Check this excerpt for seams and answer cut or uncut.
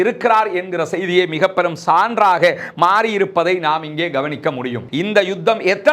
cut